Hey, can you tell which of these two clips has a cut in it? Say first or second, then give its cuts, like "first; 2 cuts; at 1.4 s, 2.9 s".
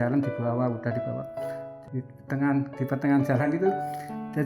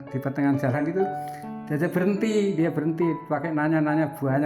first; 1 cut; at 1.7 s